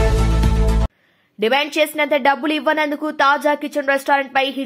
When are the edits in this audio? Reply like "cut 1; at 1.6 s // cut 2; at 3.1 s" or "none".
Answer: cut 1; at 0.9 s